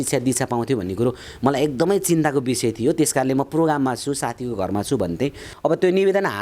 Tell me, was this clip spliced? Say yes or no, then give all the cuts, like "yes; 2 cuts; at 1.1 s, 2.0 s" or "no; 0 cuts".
yes; 1 cut; at 5.4 s